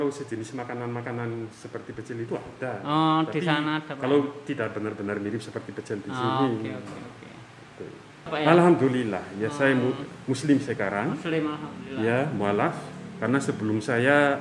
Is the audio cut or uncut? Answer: cut